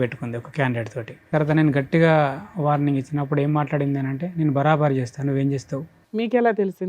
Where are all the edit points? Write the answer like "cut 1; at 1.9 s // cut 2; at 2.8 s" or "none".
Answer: cut 1; at 1.3 s // cut 2; at 6.0 s